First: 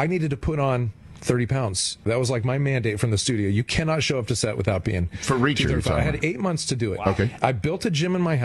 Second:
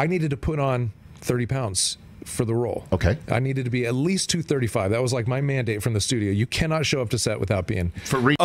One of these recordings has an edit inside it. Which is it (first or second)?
first